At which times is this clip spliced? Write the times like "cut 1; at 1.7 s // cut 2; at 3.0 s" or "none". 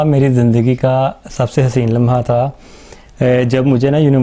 none